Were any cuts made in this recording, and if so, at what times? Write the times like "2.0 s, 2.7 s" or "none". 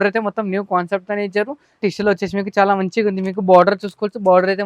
1.8 s